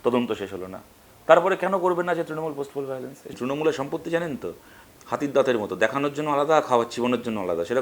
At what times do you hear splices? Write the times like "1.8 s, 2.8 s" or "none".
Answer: 3.2 s

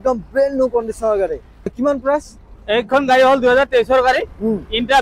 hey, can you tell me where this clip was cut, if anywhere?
none

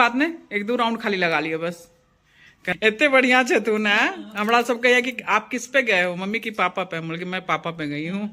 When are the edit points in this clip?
2.6 s

